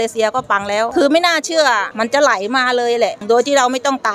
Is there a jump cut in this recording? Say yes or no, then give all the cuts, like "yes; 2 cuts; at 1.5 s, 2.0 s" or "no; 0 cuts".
yes; 1 cut; at 1.9 s